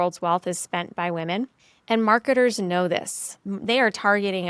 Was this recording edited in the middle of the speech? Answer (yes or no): yes